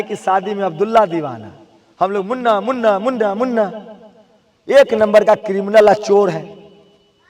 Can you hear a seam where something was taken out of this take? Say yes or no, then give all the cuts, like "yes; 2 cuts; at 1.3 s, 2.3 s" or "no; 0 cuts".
no; 0 cuts